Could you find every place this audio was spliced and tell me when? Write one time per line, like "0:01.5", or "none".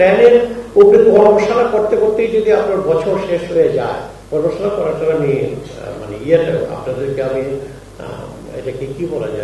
none